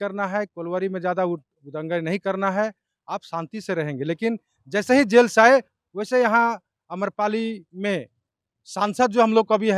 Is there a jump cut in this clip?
no; 0 cuts

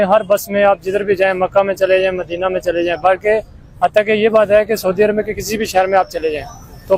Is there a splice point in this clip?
no; 0 cuts

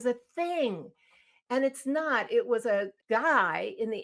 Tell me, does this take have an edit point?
yes; 1 cut; at 2.9 s

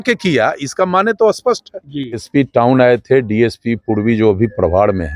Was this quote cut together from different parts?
yes; 1 cut; at 2.2 s

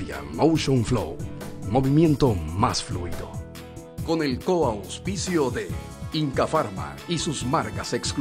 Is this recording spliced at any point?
no; 0 cuts

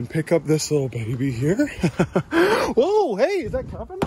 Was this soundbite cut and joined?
no; 0 cuts

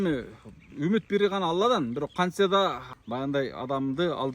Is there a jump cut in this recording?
yes; 1 cut; at 2.9 s

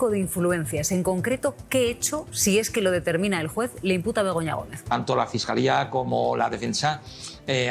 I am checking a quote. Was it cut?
yes; 1 cut; at 4.9 s

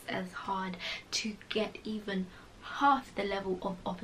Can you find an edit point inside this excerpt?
no; 0 cuts

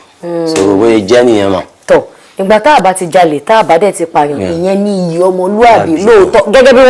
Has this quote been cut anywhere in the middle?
no; 0 cuts

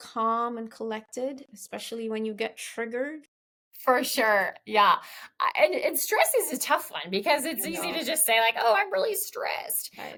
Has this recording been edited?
no; 0 cuts

